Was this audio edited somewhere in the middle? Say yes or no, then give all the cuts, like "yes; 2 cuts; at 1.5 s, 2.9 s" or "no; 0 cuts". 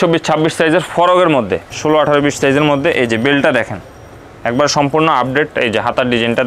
yes; 1 cut; at 1.7 s